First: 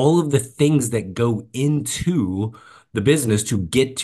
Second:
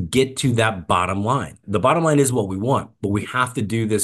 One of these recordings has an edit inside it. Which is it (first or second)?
second